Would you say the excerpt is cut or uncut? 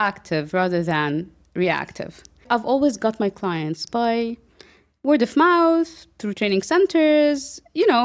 cut